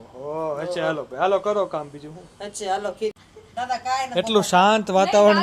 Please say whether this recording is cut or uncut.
cut